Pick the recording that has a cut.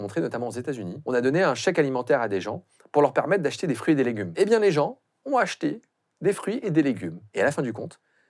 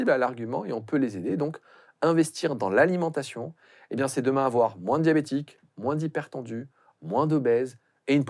first; 3 cuts; at 0.9 s, 4.3 s, 7.2 s

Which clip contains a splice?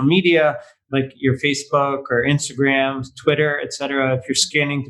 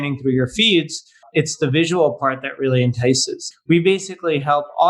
second; 2 cuts; at 1.2 s, 3.4 s

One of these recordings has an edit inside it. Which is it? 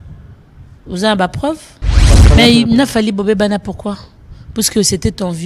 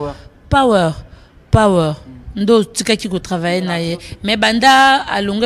first; 1 cut; at 2.2 s

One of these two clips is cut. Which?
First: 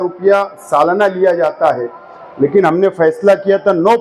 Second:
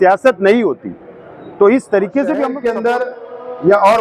second; 1 cut; at 2.5 s

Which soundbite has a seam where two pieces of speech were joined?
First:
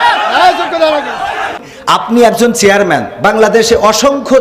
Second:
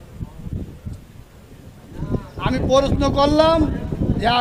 first; 1 cut; at 1.7 s

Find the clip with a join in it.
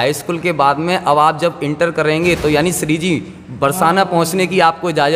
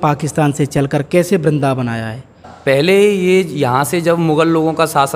second; 1 cut; at 2.5 s

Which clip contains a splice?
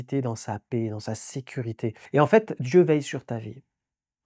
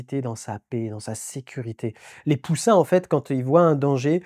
first; 1 cut; at 2.0 s

